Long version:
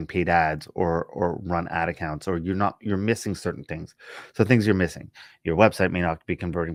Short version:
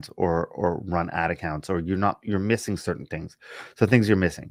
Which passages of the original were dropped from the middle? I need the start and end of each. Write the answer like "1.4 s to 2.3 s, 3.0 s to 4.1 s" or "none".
none